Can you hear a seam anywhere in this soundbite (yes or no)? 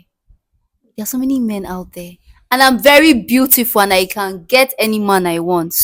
no